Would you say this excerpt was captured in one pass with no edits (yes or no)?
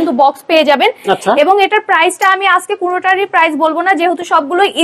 yes